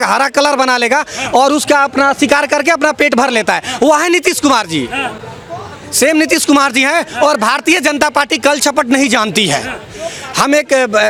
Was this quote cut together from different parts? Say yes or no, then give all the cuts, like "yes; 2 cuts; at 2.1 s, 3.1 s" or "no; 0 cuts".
no; 0 cuts